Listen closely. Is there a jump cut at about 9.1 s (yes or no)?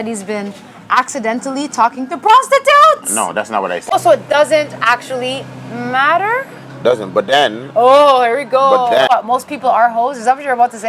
yes